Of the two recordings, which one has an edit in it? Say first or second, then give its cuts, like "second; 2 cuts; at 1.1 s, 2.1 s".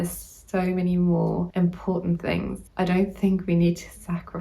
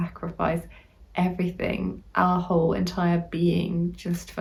first; 2 cuts; at 1.5 s, 2.6 s